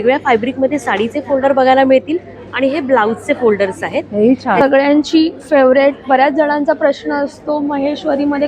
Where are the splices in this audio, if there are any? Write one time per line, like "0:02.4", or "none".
0:04.6